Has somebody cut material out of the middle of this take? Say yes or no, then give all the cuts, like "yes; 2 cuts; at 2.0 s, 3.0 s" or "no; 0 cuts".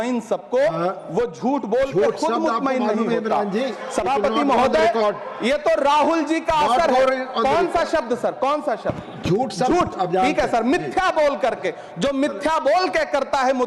no; 0 cuts